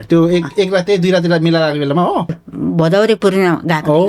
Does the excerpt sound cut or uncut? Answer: cut